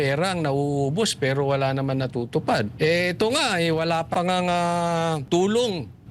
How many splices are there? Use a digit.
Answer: 3